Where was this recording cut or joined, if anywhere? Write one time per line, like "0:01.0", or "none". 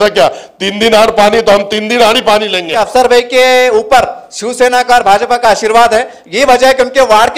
0:02.6